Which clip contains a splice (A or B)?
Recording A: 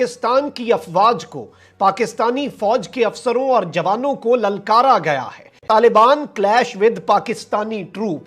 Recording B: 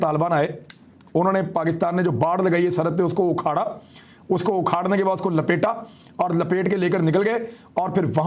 A